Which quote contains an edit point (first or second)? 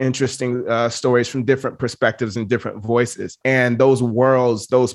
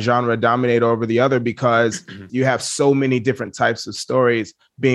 second